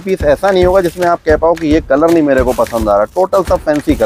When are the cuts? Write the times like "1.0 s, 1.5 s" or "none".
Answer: none

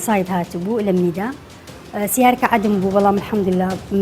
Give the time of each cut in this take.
none

